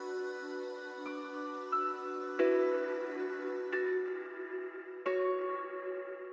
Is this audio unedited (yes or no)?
yes